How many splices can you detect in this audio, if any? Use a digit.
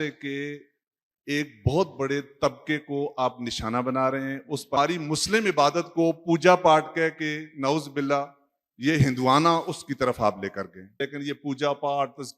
2